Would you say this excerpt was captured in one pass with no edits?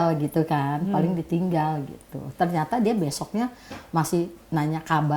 yes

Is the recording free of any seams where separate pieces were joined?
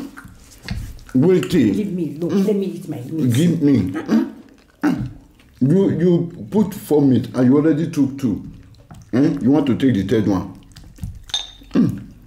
yes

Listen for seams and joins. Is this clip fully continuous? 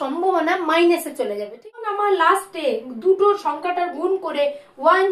no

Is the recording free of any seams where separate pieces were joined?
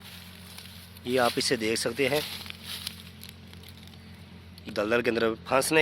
no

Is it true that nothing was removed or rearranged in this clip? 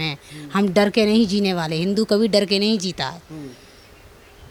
yes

